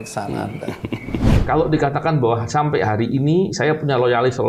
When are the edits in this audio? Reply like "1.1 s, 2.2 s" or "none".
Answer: 1.3 s